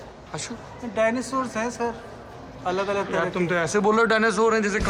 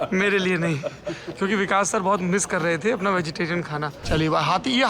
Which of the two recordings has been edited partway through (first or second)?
second